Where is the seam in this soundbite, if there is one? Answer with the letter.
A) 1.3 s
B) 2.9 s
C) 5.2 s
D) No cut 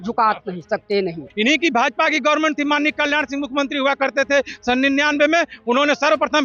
A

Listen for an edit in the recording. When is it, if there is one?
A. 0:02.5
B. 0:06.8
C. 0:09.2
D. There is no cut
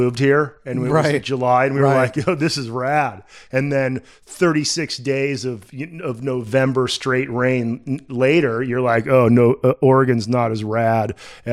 D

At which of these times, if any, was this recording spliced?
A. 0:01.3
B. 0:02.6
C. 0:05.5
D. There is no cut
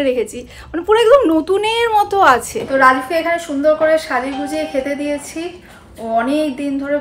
B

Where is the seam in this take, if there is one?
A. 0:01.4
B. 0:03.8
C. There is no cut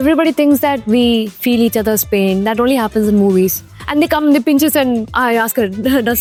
C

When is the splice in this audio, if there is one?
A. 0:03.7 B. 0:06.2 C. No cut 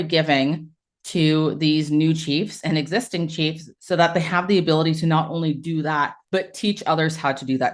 B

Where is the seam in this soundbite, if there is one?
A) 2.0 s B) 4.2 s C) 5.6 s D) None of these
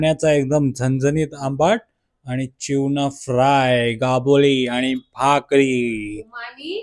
D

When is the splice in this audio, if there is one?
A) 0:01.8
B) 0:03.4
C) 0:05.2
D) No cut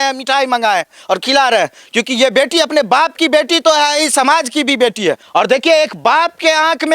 C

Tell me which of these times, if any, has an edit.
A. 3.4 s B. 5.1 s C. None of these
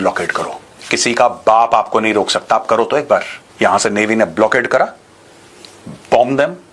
A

